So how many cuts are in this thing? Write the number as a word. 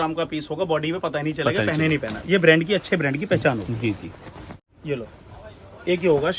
zero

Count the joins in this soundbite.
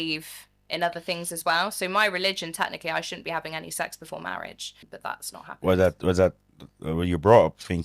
one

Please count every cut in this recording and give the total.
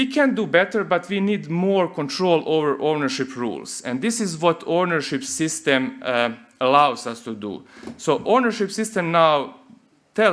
zero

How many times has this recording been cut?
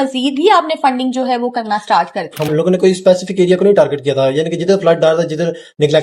one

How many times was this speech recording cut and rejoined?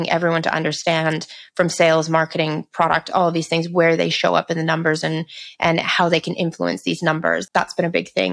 one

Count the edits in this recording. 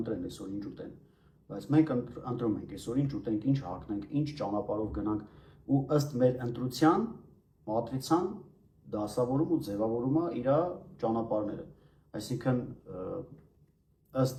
zero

